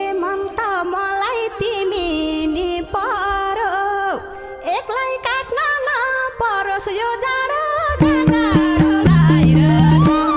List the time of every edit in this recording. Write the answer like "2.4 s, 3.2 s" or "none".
none